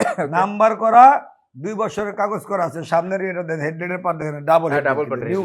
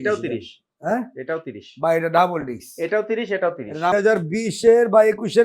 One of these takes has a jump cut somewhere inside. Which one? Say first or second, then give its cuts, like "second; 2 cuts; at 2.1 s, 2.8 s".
second; 1 cut; at 3.9 s